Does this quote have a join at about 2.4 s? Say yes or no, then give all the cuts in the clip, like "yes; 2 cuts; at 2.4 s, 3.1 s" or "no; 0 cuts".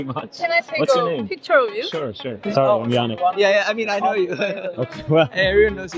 yes; 1 cut; at 2.4 s